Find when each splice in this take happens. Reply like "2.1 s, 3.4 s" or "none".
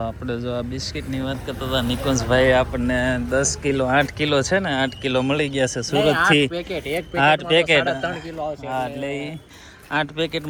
none